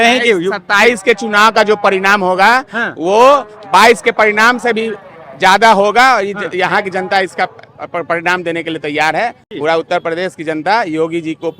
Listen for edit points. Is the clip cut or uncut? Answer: uncut